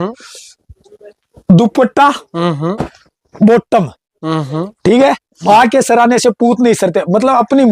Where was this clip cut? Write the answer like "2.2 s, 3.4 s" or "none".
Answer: 5.3 s